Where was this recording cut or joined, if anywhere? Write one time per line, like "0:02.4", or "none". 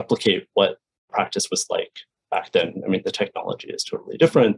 0:01.1

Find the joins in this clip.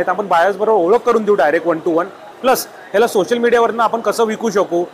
none

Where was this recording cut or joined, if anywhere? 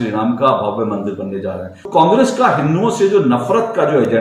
0:01.9

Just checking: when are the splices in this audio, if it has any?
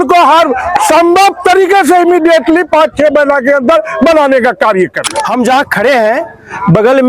0:05.1

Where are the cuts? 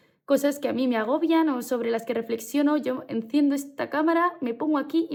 none

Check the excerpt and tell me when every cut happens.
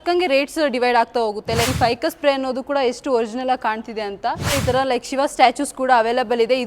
0:01.7
0:04.6

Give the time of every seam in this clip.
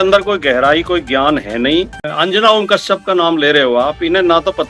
0:01.9

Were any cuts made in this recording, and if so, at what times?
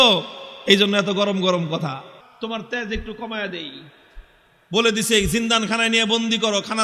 0:02.2

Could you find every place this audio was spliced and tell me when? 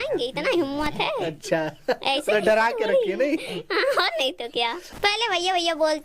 0:04.9

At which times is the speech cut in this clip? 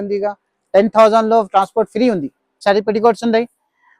0:02.6

